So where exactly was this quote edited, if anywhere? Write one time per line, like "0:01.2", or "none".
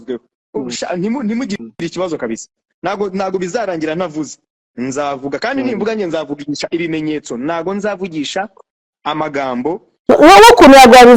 0:09.9